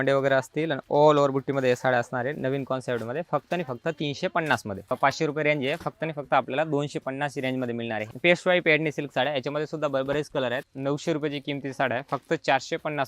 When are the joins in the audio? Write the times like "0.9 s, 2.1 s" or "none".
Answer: 5.0 s, 8.0 s, 10.6 s